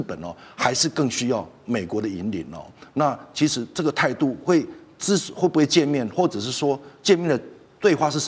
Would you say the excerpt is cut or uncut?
uncut